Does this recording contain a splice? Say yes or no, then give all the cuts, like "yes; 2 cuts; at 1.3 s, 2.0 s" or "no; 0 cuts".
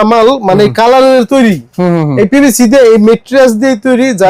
no; 0 cuts